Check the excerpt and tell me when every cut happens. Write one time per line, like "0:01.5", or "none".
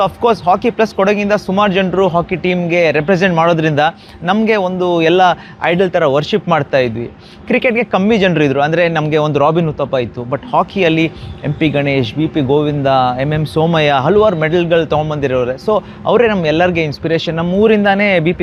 none